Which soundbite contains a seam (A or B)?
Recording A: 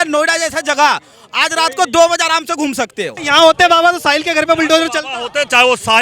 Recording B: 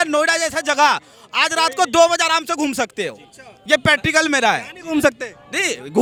A